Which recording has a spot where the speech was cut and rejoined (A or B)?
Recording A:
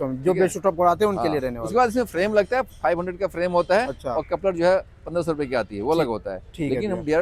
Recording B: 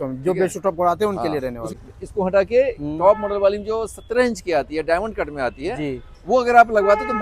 B